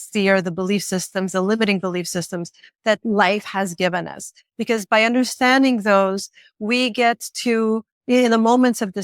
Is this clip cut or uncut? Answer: uncut